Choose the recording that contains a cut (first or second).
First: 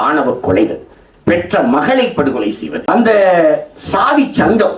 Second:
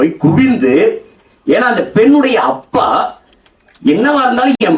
first